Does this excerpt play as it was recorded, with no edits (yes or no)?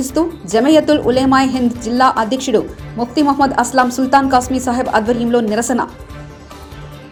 yes